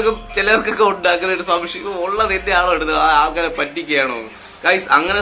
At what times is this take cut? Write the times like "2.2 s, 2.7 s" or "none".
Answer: none